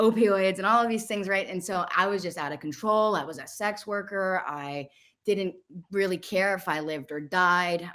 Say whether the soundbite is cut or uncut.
uncut